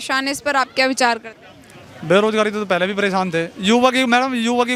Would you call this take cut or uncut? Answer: uncut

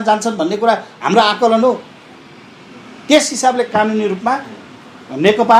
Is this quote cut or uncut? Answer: uncut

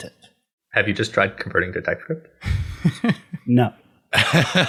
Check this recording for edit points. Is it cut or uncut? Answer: uncut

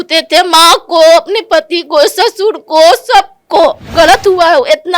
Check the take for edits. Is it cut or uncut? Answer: cut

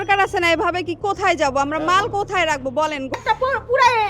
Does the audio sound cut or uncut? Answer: cut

